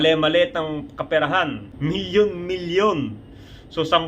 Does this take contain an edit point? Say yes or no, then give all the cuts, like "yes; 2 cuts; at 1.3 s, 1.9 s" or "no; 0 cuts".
yes; 1 cut; at 1.7 s